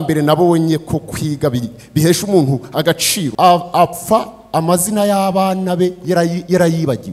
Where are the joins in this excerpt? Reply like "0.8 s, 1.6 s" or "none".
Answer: 3.2 s